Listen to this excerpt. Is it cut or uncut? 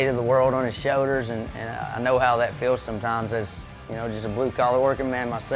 uncut